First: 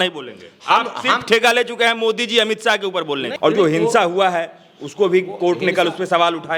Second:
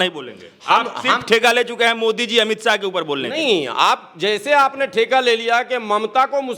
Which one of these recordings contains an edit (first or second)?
first